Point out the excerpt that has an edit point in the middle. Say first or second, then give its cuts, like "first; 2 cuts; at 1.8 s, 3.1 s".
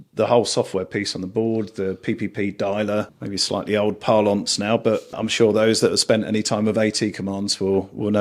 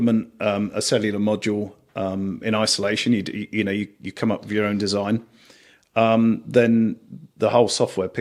first; 2 cuts; at 3.2 s, 5.2 s